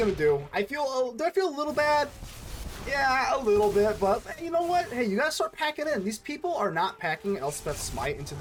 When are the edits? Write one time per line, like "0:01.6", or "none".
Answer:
none